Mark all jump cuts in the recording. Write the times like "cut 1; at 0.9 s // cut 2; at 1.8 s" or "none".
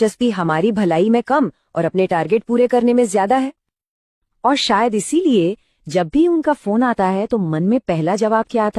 cut 1; at 4.9 s